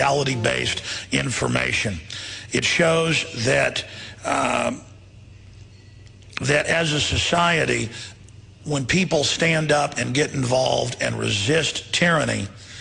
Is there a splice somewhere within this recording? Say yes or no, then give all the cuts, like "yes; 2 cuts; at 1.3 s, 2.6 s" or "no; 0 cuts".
no; 0 cuts